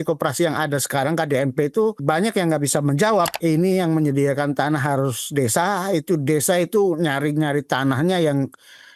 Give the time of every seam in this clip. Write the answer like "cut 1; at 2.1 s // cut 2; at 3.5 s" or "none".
cut 1; at 2.0 s // cut 2; at 3.3 s